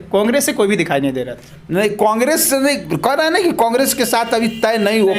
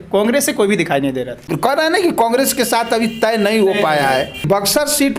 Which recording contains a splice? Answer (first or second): second